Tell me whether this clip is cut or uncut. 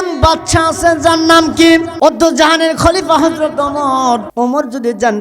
cut